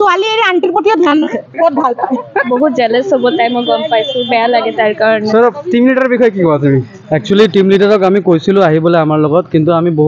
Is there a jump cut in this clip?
yes; 1 cut; at 2.5 s

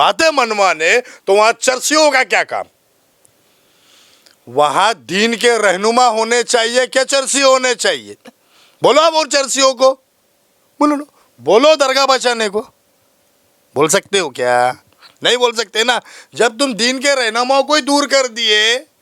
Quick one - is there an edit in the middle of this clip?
no; 0 cuts

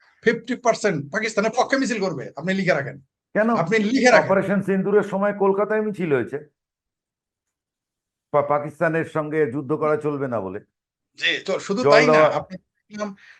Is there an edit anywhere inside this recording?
no; 0 cuts

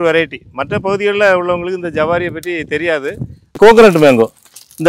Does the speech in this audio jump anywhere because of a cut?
yes; 1 cut; at 3.6 s

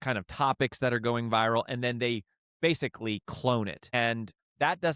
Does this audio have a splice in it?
yes; 1 cut; at 3.9 s

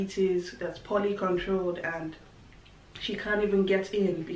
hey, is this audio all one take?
yes; 0 cuts

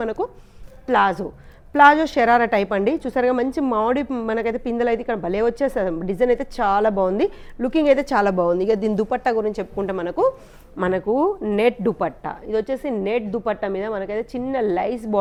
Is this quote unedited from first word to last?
yes; 0 cuts

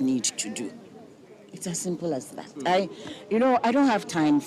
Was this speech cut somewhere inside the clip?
no; 0 cuts

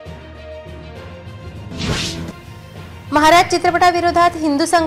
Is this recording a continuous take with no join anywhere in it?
no; 1 cut; at 1.0 s

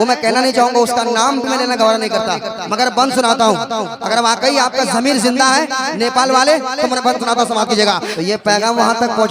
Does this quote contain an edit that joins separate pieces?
yes; 1 cut; at 8.1 s

